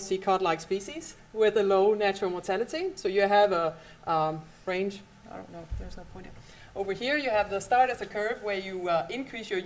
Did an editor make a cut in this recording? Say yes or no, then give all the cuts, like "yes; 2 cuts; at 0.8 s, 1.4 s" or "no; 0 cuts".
yes; 1 cut; at 1.6 s